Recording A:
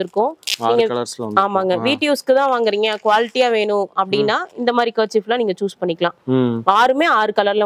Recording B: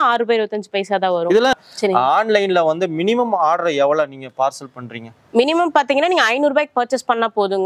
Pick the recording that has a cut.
B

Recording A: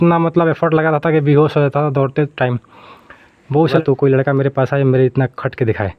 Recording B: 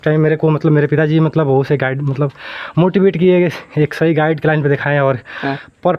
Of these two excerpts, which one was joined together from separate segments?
A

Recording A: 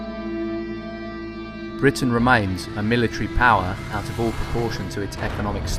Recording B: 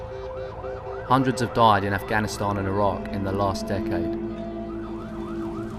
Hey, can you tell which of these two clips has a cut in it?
B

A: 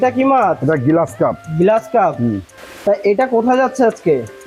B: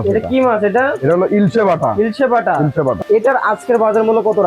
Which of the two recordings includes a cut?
B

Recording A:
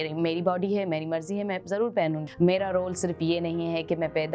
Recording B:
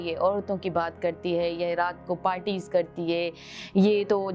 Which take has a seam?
A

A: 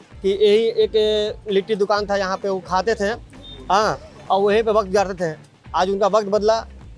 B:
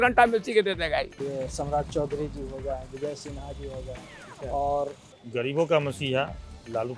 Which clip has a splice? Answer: B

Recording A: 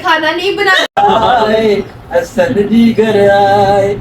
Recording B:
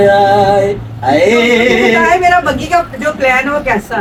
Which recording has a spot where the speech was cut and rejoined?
A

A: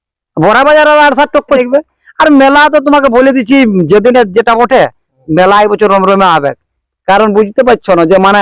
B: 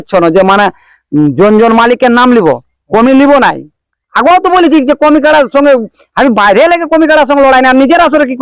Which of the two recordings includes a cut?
A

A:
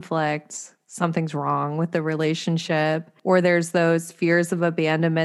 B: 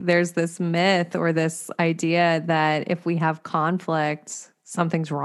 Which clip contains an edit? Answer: A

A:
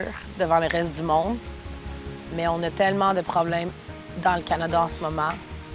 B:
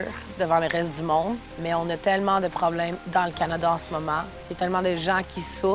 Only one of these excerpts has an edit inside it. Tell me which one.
B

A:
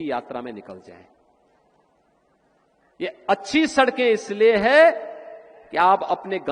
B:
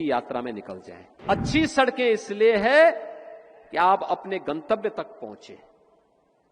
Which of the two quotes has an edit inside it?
B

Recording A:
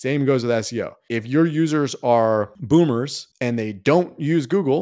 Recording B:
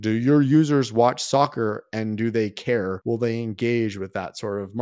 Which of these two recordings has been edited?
B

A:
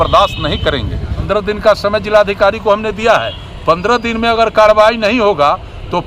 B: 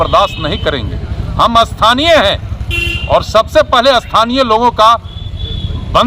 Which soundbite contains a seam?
A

